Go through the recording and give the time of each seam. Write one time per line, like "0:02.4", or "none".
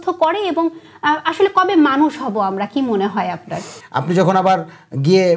0:03.8